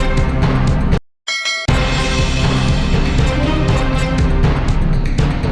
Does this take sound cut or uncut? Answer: cut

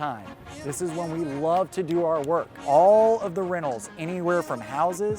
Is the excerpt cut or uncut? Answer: cut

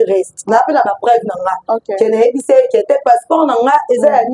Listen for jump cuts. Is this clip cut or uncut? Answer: uncut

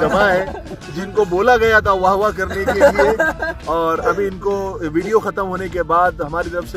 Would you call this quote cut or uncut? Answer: uncut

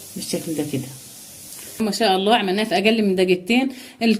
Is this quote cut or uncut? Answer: cut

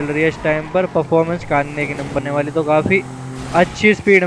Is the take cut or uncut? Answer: cut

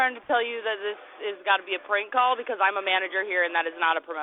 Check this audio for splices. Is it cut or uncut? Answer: uncut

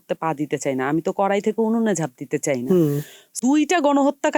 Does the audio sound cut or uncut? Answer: cut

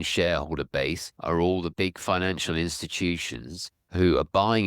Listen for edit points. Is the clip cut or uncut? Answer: cut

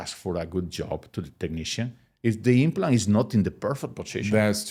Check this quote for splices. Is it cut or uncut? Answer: uncut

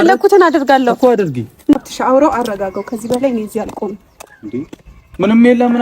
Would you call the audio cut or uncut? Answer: cut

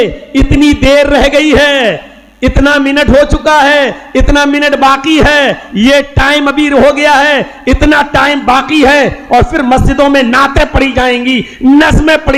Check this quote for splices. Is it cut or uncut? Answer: uncut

